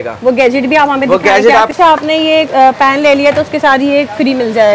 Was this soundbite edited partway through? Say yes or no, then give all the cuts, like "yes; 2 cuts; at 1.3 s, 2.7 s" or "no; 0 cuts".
yes; 1 cut; at 1.7 s